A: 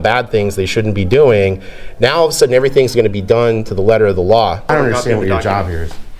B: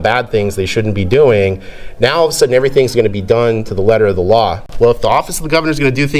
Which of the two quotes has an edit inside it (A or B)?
A